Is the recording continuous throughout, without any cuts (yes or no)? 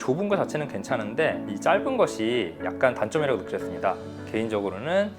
no